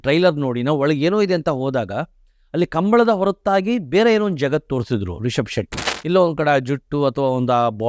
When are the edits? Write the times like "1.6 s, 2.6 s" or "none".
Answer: 5.9 s